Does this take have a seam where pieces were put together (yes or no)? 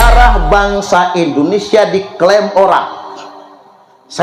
no